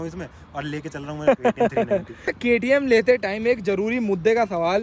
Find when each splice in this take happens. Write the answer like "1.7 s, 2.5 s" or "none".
2.3 s

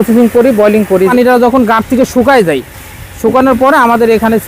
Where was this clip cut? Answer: 1.1 s

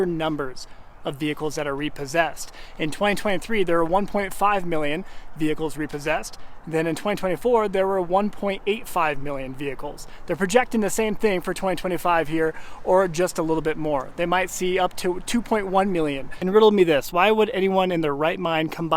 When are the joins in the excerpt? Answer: 16.3 s

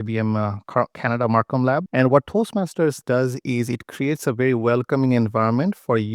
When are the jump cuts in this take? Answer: 1.9 s

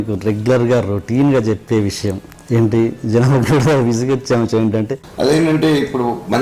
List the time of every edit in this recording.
5.0 s

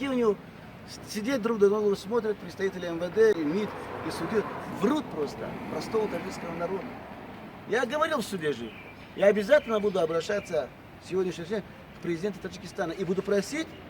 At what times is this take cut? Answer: 3.4 s

